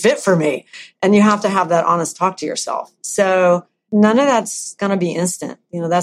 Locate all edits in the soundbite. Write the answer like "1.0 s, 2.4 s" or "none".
3.9 s, 4.8 s